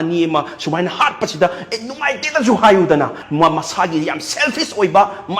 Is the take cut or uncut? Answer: cut